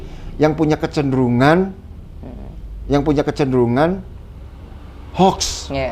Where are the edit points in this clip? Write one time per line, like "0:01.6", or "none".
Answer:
none